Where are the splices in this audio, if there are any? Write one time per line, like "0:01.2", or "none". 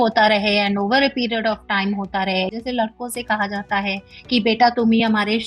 0:02.5